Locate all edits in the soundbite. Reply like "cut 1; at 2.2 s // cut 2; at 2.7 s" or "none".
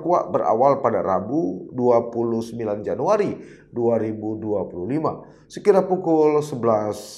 none